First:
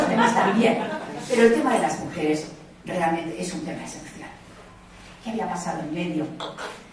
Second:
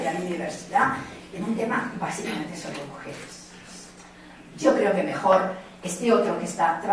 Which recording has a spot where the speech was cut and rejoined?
first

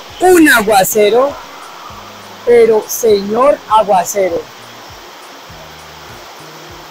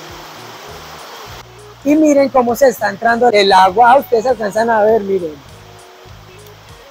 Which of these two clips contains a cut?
second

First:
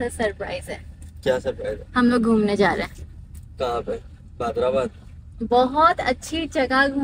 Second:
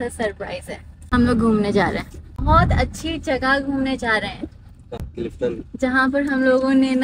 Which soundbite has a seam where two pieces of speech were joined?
second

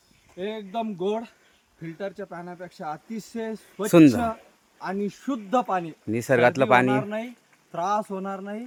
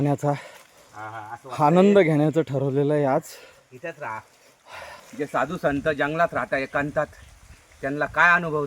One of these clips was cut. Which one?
second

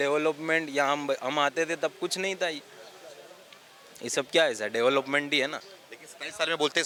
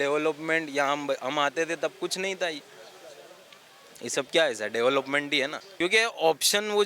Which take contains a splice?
second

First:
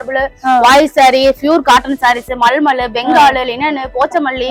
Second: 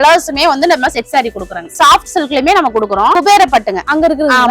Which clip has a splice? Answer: second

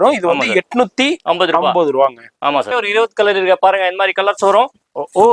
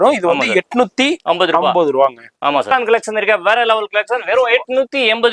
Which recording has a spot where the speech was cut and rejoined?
first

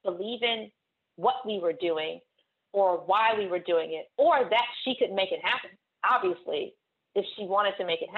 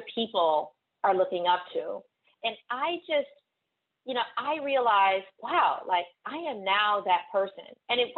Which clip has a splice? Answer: second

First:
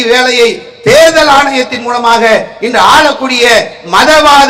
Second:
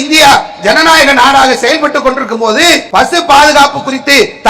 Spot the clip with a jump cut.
second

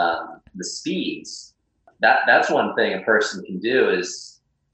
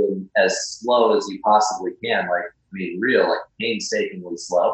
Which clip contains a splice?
first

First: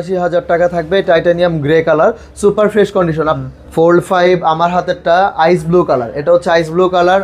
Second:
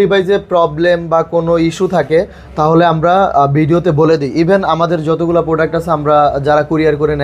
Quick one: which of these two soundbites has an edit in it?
first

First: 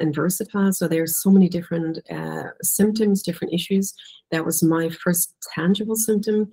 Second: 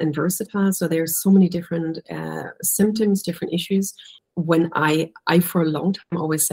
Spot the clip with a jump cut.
second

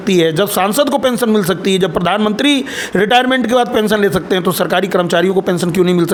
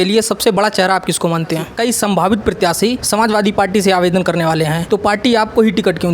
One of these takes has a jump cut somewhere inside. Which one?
second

